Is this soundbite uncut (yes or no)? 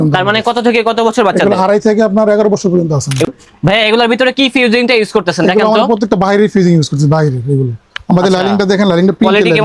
no